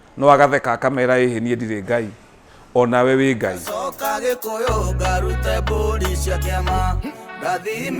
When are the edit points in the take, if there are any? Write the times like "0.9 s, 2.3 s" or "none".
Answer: 3.6 s